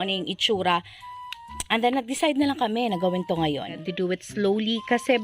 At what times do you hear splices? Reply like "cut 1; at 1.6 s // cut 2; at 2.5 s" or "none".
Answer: cut 1; at 3.8 s